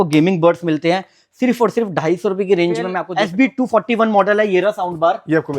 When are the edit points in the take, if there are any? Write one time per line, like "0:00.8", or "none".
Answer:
0:03.0